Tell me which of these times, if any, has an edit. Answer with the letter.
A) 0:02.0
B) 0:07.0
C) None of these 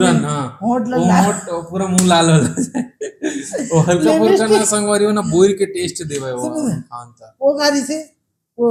C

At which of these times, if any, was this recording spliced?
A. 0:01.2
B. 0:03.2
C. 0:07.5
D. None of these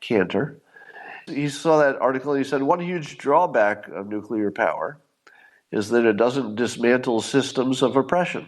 A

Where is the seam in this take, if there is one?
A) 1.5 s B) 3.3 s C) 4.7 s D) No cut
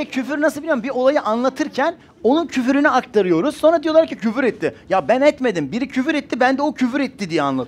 D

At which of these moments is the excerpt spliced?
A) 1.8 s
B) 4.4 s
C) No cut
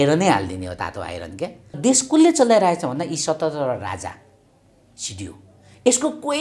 A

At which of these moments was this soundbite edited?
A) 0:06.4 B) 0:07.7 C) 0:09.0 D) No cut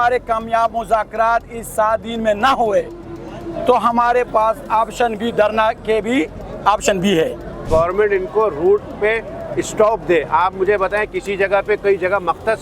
B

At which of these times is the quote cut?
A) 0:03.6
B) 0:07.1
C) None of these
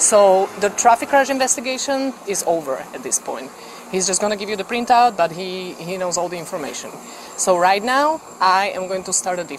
B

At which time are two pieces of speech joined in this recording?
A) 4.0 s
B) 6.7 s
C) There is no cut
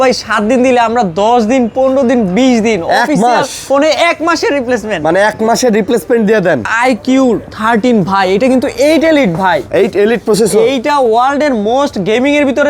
B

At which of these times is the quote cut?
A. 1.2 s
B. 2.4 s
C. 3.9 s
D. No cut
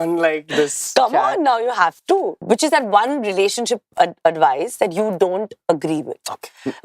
B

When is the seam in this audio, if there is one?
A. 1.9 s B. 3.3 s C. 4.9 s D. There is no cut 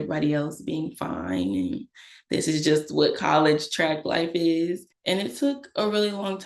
C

